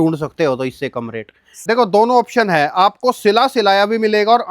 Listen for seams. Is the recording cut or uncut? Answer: cut